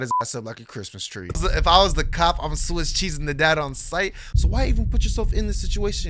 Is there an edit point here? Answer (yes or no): yes